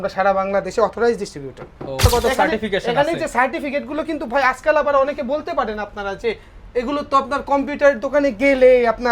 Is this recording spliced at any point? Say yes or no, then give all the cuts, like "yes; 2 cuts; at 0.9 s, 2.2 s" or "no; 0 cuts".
yes; 1 cut; at 2.0 s